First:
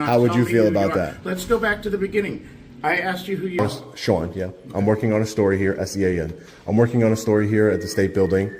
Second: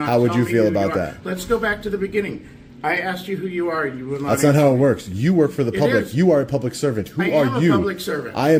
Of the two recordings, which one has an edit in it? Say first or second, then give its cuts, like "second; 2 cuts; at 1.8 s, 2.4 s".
first; 1 cut; at 3.6 s